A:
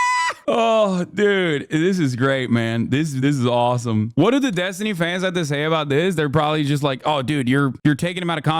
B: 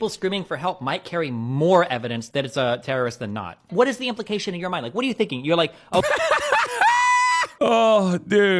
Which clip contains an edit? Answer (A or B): A